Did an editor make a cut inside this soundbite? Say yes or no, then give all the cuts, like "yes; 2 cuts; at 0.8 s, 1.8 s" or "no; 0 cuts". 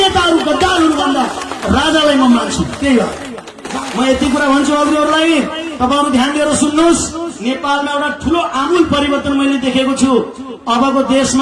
yes; 1 cut; at 3.6 s